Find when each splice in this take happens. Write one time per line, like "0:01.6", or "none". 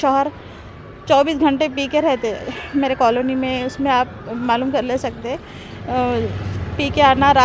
none